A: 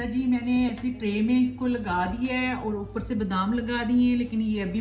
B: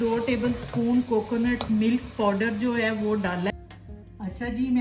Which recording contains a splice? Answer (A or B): B